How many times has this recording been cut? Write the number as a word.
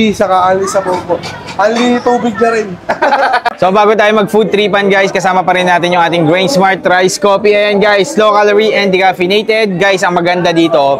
zero